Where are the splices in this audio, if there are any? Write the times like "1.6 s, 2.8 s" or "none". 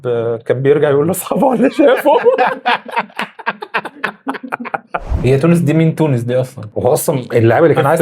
5.1 s